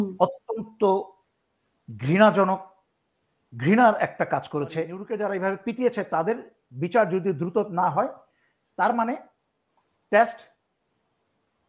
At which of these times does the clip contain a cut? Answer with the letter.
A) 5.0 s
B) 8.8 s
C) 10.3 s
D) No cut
A